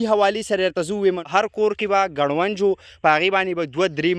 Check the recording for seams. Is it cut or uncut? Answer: cut